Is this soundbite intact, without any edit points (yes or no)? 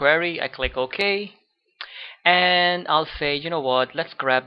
yes